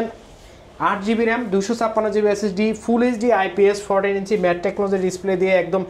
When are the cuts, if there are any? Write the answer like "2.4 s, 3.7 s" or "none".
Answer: none